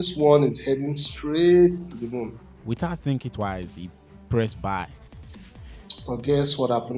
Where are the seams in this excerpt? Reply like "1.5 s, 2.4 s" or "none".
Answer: 2.5 s, 5.3 s